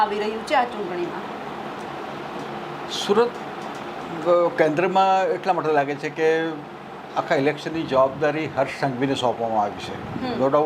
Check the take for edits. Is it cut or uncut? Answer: uncut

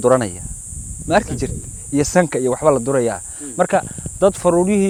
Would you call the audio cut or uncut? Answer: uncut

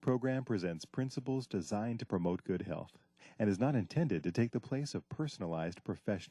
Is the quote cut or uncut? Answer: uncut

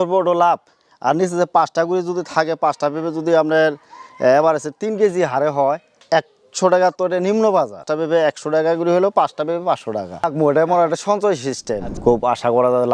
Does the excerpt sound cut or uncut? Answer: cut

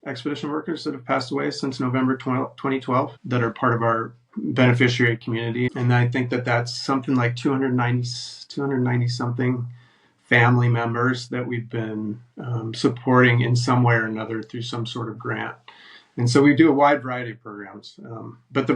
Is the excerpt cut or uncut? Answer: cut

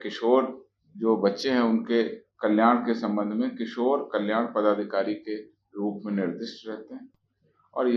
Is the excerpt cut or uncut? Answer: uncut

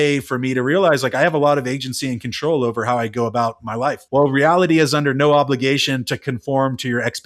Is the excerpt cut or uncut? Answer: cut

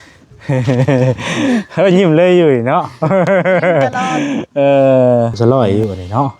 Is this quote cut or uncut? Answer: cut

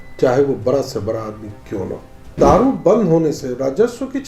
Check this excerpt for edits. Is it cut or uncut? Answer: cut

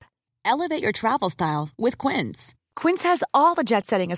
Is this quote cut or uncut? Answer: uncut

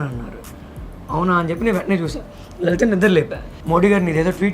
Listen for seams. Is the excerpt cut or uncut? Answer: cut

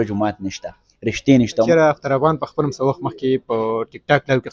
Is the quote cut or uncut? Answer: cut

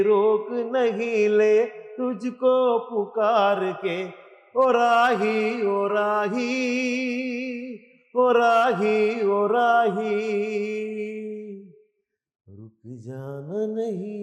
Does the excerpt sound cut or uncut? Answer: uncut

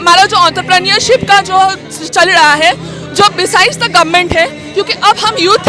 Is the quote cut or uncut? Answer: uncut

